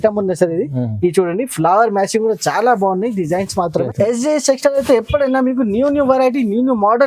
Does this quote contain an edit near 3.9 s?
yes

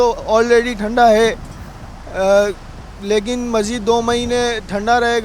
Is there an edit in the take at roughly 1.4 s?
no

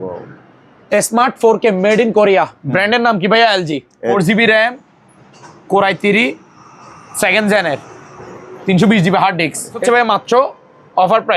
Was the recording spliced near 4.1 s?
yes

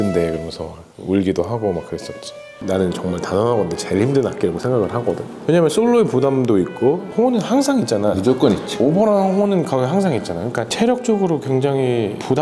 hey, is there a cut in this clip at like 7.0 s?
yes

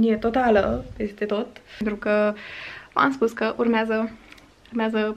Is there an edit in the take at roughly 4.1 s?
no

